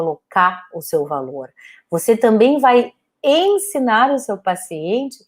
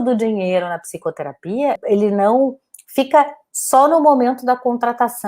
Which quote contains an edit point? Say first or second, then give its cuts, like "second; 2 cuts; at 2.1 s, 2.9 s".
second; 1 cut; at 1.8 s